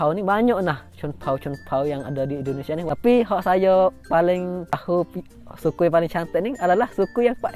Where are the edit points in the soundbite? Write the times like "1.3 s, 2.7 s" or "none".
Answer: 2.8 s, 4.7 s

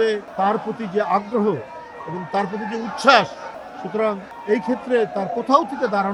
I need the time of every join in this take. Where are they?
none

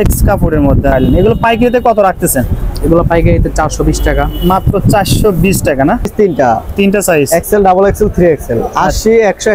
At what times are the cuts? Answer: 0.9 s, 6.1 s

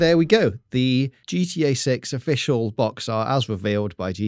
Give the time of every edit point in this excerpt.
1.2 s

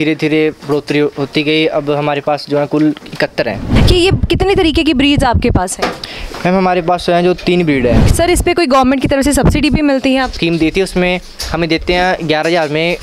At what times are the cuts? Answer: 3.7 s, 8.1 s, 10.3 s

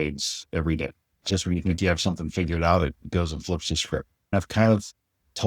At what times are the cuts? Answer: 1.1 s, 4.3 s

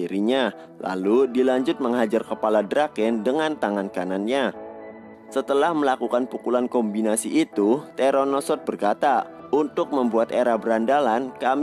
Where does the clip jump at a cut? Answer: none

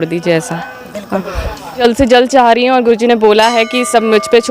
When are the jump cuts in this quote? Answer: 1.8 s

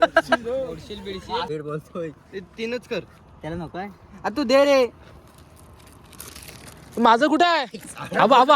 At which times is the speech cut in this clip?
1.5 s

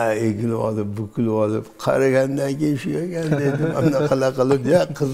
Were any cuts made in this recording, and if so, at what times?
none

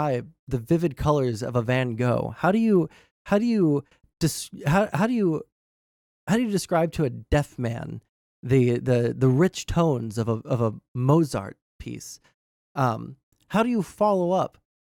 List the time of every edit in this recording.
none

